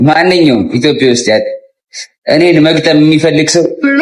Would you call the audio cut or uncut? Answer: uncut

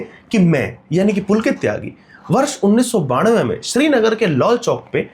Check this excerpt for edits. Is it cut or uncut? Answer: uncut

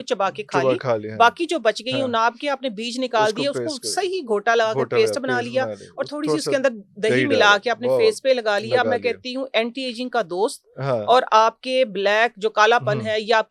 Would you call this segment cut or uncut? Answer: uncut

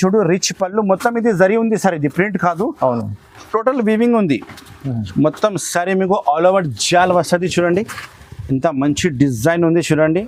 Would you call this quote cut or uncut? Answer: uncut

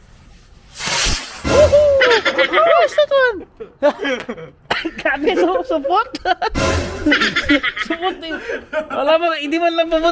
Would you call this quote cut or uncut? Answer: uncut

